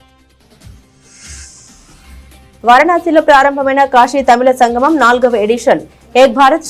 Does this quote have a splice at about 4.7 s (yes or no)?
no